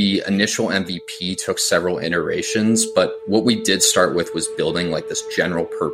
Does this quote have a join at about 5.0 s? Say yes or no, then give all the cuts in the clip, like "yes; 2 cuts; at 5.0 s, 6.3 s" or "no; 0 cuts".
no; 0 cuts